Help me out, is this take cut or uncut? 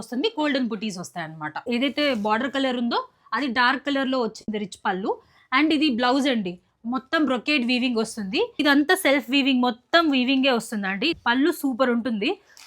cut